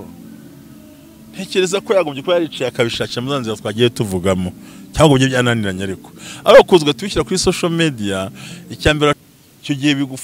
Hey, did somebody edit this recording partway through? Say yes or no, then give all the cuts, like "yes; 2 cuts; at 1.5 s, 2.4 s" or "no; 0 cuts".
yes; 1 cut; at 9.2 s